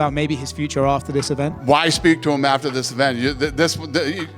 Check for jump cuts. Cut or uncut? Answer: cut